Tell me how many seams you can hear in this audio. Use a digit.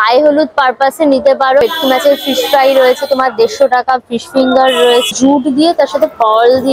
2